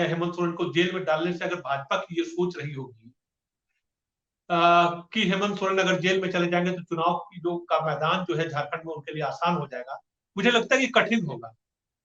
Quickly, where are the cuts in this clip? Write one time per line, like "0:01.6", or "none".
none